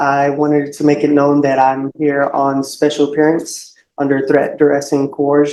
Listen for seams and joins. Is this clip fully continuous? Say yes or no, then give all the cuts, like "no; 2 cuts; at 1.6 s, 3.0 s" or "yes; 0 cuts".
yes; 0 cuts